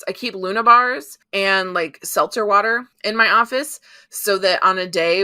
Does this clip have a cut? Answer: yes; 2 cuts; at 1.1 s, 2.9 s

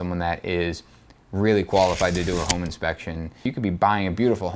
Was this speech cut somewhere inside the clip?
yes; 1 cut; at 3.5 s

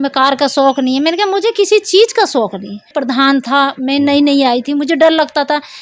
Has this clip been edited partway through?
yes; 1 cut; at 2.9 s

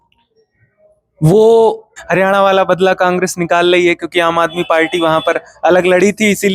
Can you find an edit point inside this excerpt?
yes; 1 cut; at 2.0 s

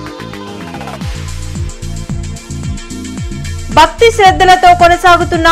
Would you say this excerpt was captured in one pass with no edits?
yes; 0 cuts

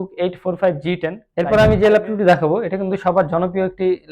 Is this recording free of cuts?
no; 1 cut; at 1.2 s

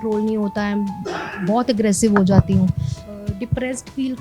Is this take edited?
yes; 1 cut; at 3.0 s

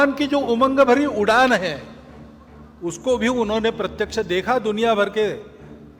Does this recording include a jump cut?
no; 0 cuts

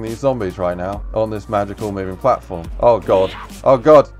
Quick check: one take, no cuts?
no; 2 cuts; at 1.0 s, 2.6 s

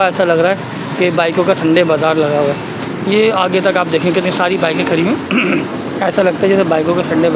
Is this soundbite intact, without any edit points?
yes; 0 cuts

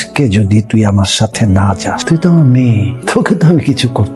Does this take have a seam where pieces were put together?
yes; 2 cuts; at 2.0 s, 2.9 s

